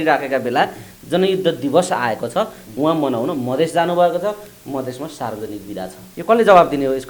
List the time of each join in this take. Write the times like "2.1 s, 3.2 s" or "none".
6.1 s